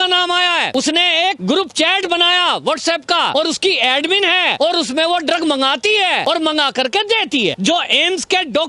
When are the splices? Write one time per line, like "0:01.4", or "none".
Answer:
0:01.0
0:03.3
0:04.5
0:06.2
0:07.6